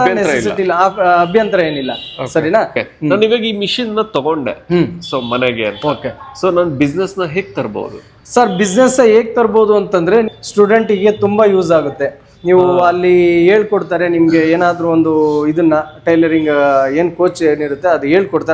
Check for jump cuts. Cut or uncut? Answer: cut